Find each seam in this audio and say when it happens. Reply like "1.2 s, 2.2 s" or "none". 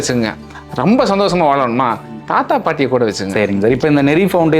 3.4 s